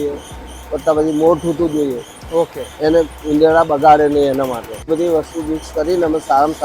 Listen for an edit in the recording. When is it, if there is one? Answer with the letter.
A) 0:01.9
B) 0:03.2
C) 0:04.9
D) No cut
C